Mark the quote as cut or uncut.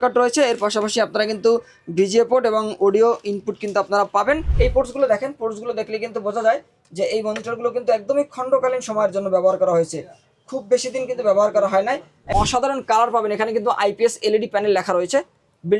cut